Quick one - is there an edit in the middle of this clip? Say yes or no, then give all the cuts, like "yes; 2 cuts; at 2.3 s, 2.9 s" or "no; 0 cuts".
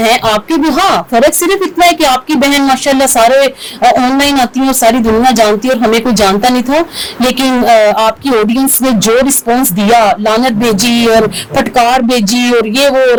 no; 0 cuts